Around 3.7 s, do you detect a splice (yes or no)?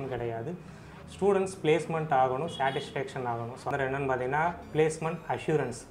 yes